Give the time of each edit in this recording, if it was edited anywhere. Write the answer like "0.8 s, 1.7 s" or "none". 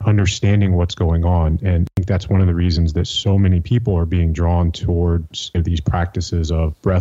1.9 s

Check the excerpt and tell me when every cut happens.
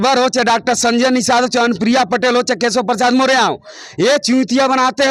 none

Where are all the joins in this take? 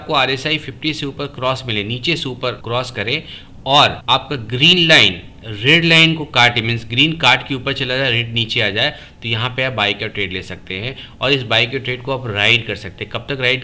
2.6 s, 4.0 s

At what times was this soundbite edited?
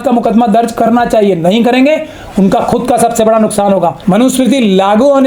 4.0 s

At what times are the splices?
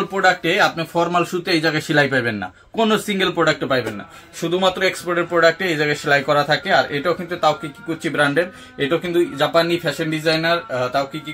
none

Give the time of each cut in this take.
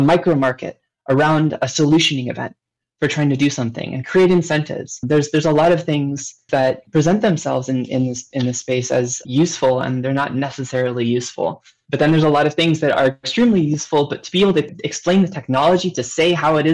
9.2 s, 11.7 s

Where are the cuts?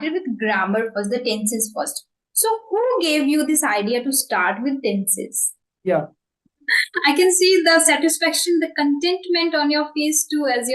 5.6 s

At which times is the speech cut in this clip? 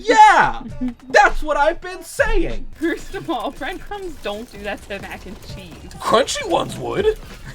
2.7 s

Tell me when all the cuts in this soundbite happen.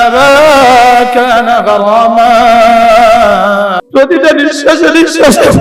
3.8 s

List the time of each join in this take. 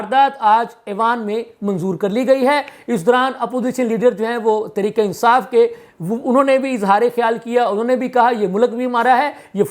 none

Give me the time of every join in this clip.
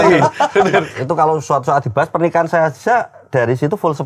0.9 s

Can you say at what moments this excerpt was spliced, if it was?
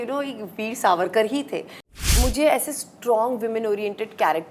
1.9 s

